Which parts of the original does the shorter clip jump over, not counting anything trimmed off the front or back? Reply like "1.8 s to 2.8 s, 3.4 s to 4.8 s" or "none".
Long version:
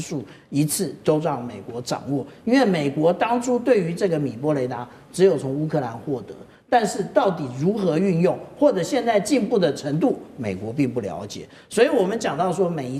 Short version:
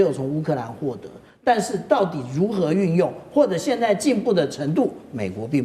none